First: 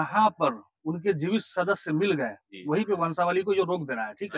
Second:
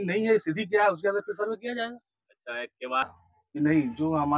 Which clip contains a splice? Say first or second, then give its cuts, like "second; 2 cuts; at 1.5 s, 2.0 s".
second; 1 cut; at 3.1 s